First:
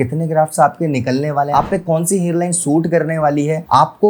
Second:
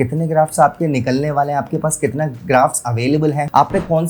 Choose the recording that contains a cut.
first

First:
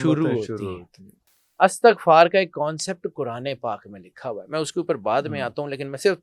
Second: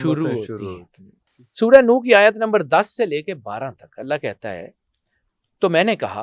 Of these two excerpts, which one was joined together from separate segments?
second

